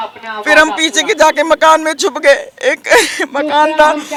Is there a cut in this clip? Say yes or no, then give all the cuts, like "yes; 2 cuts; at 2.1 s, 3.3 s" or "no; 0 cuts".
no; 0 cuts